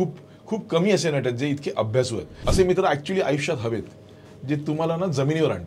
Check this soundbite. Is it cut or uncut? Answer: cut